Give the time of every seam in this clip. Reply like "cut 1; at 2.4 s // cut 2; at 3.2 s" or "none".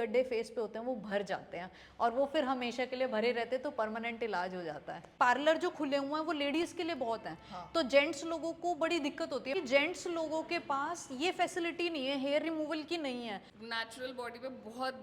cut 1; at 5.0 s // cut 2; at 9.5 s // cut 3; at 13.5 s